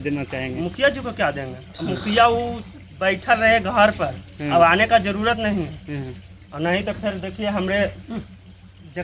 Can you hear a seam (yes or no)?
no